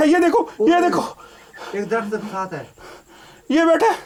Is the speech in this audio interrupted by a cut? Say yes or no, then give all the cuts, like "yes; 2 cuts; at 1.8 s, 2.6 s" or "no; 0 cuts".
no; 0 cuts